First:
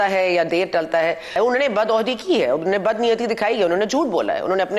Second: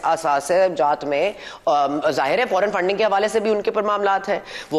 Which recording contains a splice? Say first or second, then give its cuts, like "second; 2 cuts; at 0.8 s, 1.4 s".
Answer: first; 1 cut; at 1.3 s